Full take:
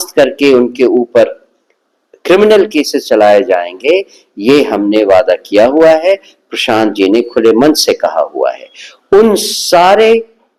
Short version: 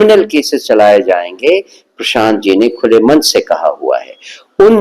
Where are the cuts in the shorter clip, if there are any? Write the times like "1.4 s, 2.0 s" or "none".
1.8 s